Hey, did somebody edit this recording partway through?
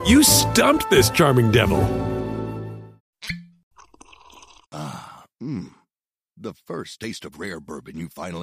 yes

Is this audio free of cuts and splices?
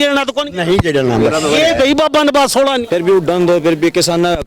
no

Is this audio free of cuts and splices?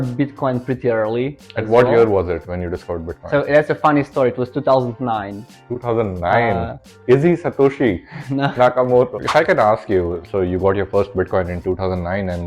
no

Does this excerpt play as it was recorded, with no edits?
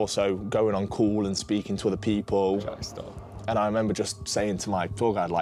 yes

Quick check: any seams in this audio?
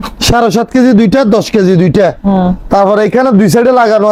no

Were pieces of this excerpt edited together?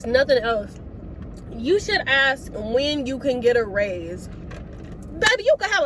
yes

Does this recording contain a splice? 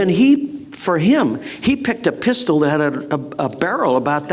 no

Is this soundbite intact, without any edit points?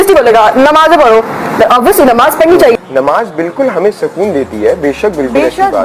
no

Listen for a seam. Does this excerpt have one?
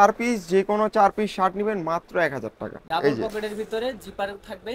yes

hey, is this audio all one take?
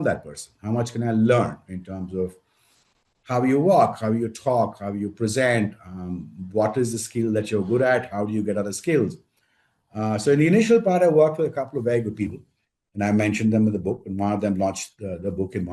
yes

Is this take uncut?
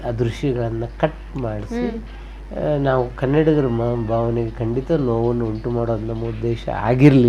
yes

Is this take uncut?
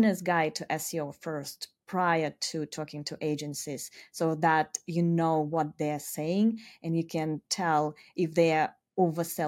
yes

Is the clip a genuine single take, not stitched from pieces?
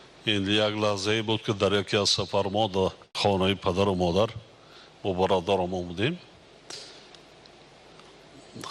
no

